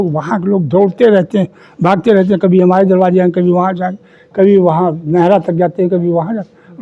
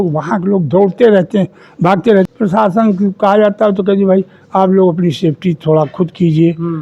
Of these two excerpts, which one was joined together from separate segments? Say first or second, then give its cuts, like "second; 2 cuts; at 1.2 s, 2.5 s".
second; 1 cut; at 2.3 s